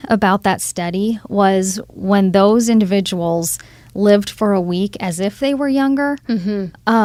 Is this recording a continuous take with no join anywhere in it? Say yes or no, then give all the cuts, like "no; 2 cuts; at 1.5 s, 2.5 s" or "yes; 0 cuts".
yes; 0 cuts